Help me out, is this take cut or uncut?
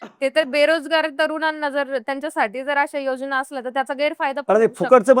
uncut